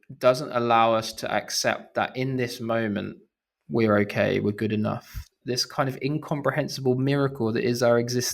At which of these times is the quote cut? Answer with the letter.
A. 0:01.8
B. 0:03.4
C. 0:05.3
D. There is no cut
C